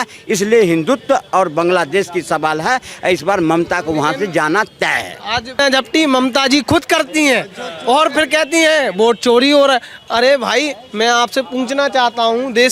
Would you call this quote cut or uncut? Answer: cut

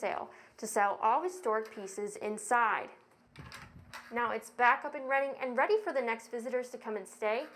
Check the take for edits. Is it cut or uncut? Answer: uncut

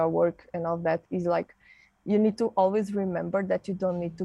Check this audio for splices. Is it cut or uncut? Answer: uncut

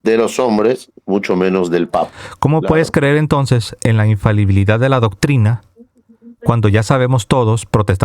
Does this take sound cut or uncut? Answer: cut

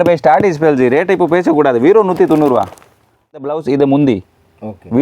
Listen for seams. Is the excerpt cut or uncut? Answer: cut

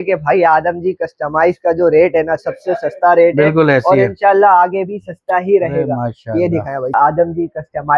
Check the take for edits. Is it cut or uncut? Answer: cut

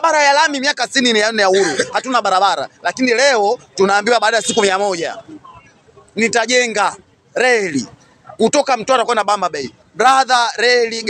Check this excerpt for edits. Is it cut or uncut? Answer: uncut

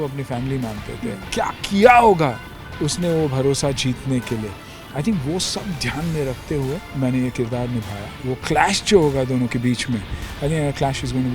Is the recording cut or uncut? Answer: cut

